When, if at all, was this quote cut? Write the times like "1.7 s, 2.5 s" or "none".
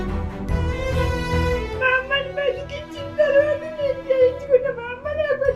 1.7 s